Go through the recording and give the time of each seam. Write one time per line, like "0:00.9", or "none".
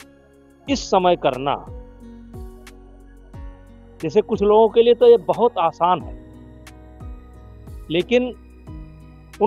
0:01.7
0:03.6